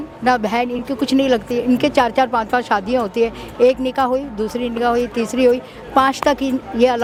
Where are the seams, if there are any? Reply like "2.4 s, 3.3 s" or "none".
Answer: none